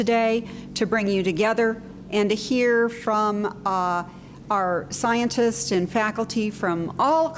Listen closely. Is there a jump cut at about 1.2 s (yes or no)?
yes